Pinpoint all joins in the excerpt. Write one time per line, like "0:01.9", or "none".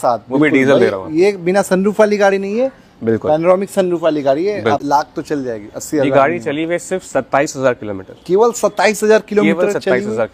0:04.8